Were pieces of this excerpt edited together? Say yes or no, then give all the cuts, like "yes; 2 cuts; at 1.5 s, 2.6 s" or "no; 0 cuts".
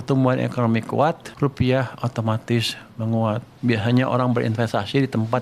yes; 2 cuts; at 1.3 s, 3.5 s